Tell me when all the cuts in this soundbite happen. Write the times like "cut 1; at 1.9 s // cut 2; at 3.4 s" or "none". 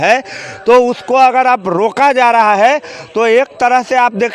none